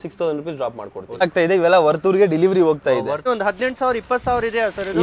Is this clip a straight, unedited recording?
no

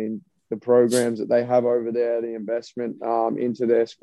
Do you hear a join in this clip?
no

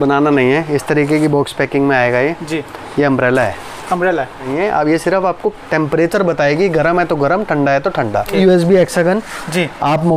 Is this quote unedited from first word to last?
no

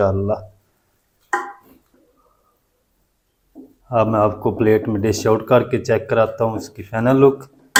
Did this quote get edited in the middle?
no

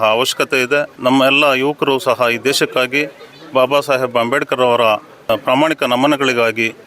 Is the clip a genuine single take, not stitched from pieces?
no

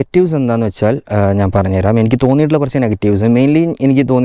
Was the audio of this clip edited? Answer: no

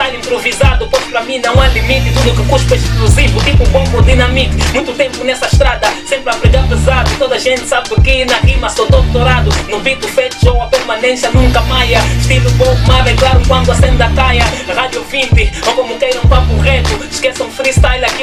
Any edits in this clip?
no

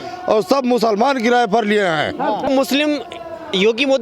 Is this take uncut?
no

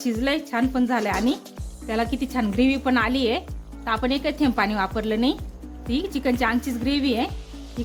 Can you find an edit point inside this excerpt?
no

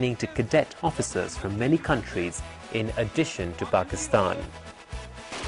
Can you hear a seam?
yes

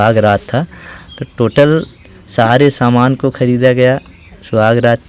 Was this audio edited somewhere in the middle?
no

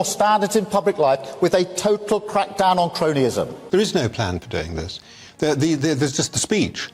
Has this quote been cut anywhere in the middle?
yes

